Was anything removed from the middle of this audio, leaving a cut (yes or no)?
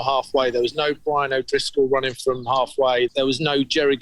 yes